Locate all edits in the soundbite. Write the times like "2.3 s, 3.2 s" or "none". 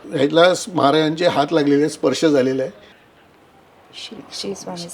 3.0 s